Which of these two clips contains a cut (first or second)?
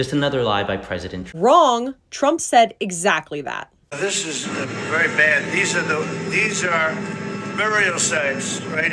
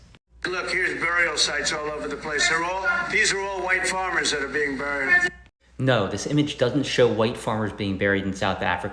first